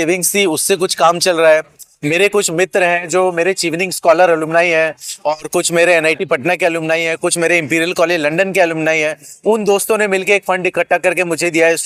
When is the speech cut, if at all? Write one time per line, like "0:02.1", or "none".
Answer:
none